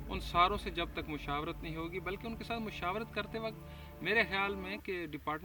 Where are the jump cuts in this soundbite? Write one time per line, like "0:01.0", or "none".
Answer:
none